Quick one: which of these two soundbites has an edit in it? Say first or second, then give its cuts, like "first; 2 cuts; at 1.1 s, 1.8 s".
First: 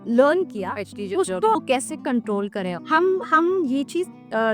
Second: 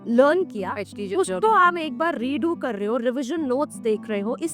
first; 1 cut; at 1.6 s